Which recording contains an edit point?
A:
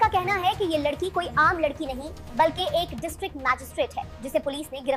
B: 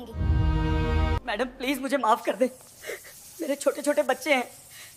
B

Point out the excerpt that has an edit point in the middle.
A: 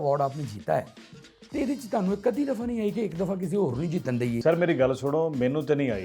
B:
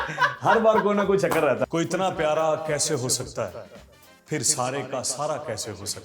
B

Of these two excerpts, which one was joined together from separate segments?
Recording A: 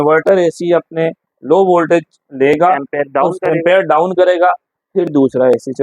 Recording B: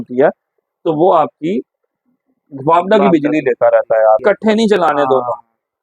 B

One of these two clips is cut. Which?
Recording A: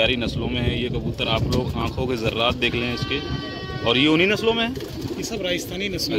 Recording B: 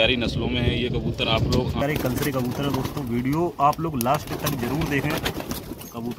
B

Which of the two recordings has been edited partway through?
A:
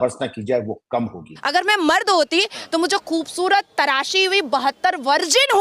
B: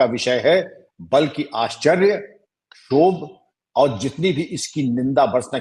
A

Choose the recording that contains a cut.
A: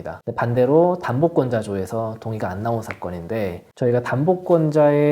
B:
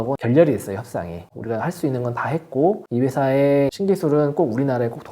B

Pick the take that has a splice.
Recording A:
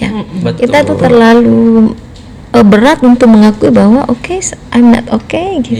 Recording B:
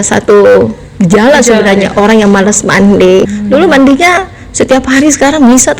B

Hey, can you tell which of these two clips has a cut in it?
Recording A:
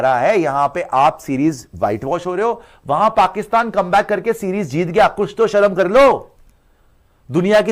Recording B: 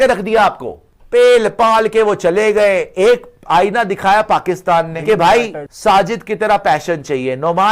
B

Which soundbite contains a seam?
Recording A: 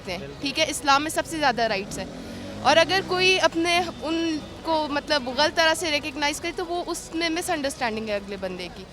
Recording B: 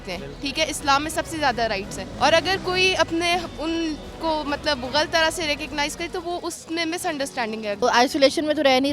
B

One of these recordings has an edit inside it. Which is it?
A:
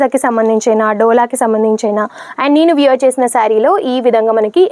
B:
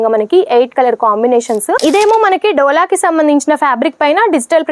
B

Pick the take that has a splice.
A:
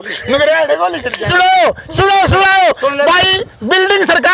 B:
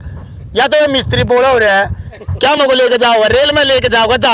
A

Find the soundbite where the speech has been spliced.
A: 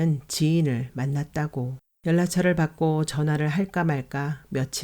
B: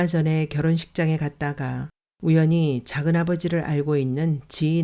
A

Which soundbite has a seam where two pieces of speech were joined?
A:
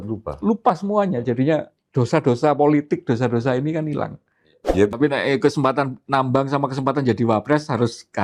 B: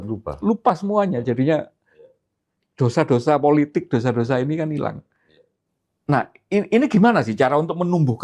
A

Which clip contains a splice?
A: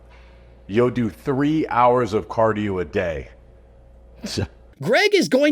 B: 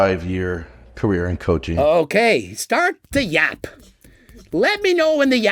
A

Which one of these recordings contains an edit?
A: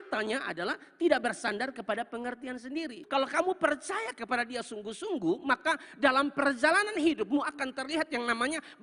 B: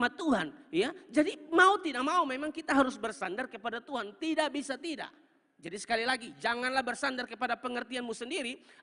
A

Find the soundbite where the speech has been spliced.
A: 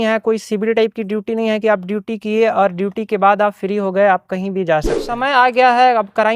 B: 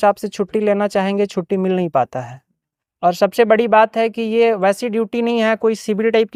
A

